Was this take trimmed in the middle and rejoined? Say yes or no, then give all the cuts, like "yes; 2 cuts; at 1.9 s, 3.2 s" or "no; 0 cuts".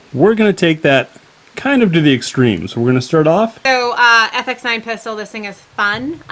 yes; 1 cut; at 3.6 s